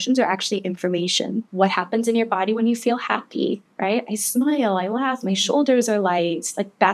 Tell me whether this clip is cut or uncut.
cut